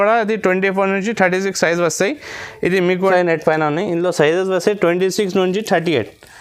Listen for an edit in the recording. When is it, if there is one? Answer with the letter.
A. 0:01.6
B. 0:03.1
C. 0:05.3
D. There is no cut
B